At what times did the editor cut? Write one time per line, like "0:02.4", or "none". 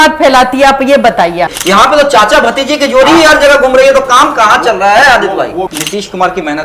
0:01.6
0:05.7

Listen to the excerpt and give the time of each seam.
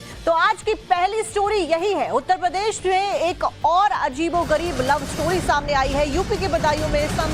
none

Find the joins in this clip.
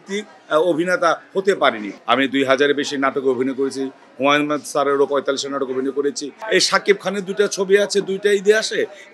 0:01.9
0:06.3

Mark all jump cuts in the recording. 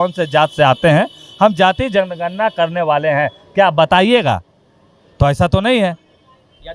none

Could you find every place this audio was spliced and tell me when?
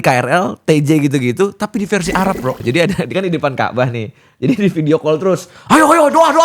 0:02.6

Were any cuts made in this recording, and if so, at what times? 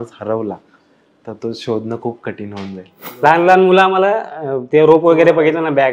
0:03.0

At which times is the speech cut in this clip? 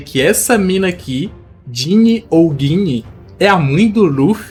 none

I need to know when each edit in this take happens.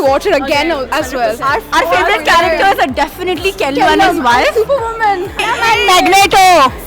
0:01.7
0:05.4

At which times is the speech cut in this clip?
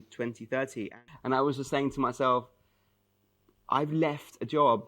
0:01.0

